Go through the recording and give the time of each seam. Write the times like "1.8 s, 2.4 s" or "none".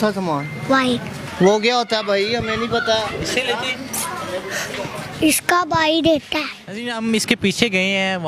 none